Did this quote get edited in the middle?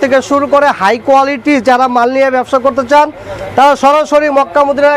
no; 0 cuts

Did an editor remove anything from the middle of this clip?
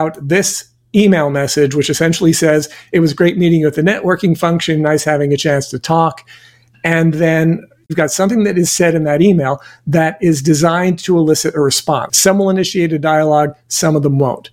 yes; 2 cuts; at 7.9 s, 12.1 s

